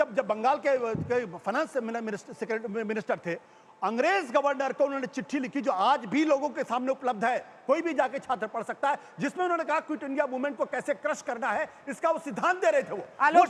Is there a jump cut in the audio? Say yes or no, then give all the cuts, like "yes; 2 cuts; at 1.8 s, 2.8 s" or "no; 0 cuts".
no; 0 cuts